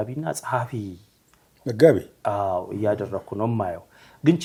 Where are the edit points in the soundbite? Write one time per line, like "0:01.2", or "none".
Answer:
none